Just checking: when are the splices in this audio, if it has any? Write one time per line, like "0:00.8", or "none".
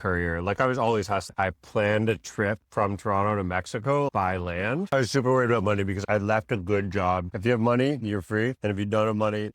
0:01.3
0:04.9
0:07.3